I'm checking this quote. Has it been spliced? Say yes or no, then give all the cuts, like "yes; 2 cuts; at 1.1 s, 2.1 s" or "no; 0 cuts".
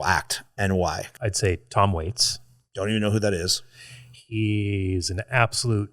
yes; 1 cut; at 1.1 s